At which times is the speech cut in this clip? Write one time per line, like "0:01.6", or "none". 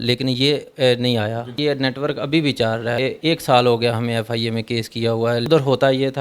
0:01.6
0:03.0
0:05.4